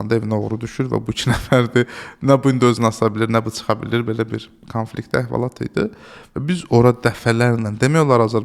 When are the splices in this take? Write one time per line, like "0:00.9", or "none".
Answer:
none